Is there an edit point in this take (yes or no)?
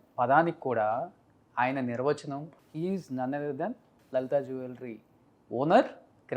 yes